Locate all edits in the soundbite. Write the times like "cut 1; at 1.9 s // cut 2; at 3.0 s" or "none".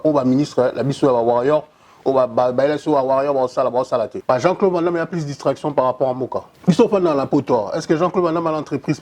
cut 1; at 4.1 s // cut 2; at 6.5 s